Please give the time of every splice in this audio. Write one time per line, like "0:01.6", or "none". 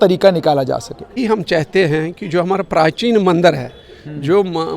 0:01.1